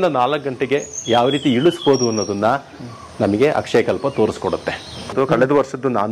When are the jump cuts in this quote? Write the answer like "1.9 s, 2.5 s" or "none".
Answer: 5.1 s